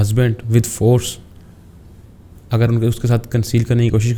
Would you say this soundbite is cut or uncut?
uncut